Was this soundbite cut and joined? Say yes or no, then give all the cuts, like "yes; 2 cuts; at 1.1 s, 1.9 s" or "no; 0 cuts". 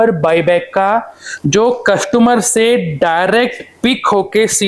no; 0 cuts